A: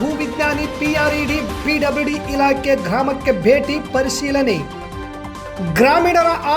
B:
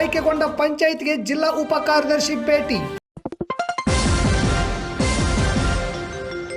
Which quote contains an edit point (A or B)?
B